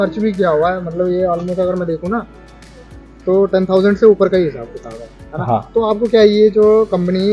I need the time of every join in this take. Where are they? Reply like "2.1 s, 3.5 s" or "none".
none